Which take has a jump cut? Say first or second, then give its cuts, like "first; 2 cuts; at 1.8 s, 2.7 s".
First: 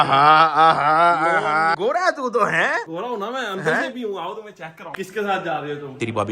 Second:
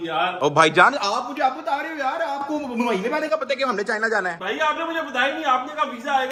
first; 2 cuts; at 1.8 s, 4.9 s